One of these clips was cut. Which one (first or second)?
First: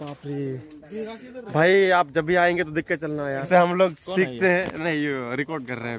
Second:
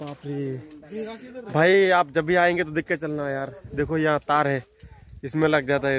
first